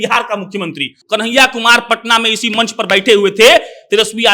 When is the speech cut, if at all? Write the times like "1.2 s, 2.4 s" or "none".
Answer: 0.9 s